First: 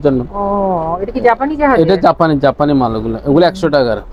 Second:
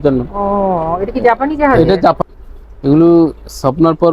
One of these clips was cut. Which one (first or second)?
second